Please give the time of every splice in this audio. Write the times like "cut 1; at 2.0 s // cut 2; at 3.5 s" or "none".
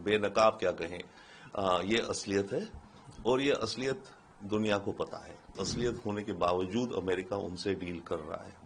cut 1; at 5.6 s